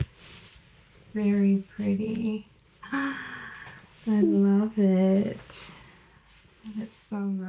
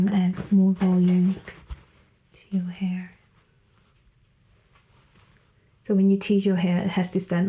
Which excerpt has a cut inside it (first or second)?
second